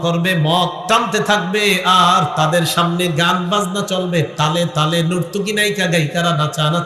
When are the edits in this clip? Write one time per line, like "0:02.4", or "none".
none